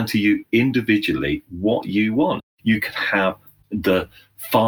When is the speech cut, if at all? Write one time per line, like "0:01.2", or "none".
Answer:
0:02.4
0:03.5